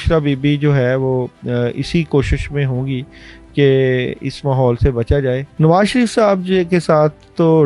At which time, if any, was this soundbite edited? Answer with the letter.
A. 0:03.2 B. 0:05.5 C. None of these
B